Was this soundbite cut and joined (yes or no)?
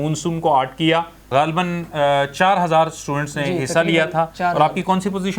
yes